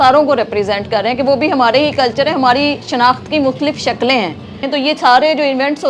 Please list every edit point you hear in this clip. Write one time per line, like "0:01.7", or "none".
0:04.6

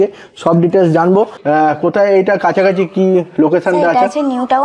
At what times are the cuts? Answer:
0:01.4

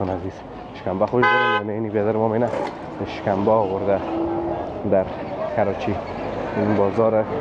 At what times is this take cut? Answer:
none

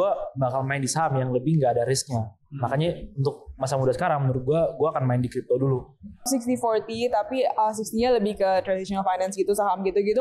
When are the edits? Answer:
0:06.3

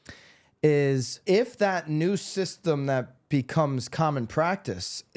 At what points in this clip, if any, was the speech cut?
0:01.1

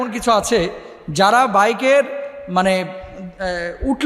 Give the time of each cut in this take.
none

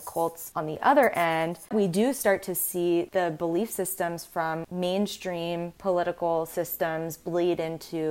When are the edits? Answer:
0:01.7
0:04.7

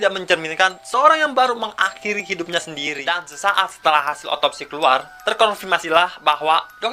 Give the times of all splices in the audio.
0:02.9

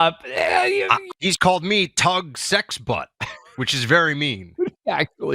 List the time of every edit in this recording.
0:01.0

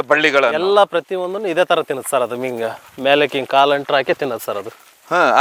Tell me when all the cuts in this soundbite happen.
none

